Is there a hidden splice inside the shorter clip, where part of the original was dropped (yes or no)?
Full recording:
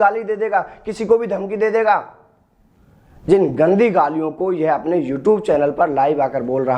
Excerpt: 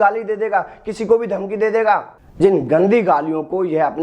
yes